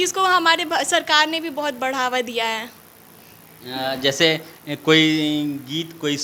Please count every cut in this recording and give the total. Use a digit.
0